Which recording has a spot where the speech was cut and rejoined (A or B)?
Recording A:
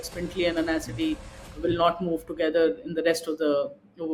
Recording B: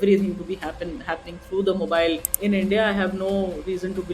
B